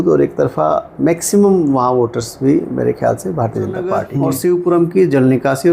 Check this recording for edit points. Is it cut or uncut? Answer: cut